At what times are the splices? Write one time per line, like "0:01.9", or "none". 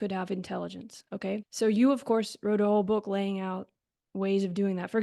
none